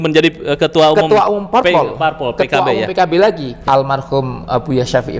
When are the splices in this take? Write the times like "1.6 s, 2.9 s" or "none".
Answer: 3.5 s

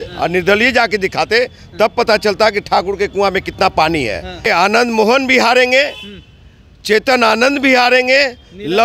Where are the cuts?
4.5 s

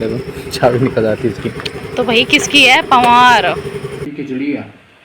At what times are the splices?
4.0 s

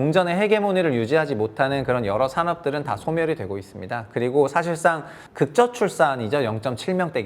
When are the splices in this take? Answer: 5.2 s

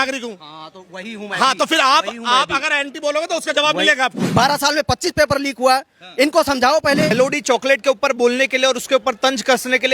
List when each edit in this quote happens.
4.2 s, 7.1 s

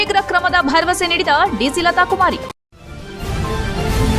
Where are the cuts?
2.5 s

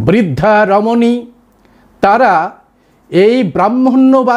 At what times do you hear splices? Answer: none

